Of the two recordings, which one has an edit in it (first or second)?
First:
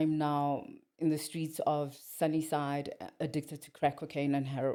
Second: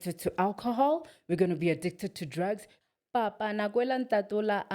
second